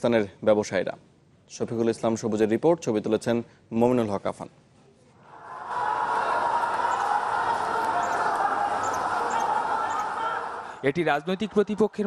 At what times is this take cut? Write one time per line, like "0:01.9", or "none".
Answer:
0:07.3